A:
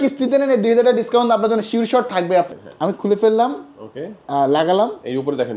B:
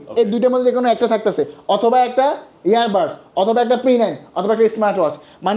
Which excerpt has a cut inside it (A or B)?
A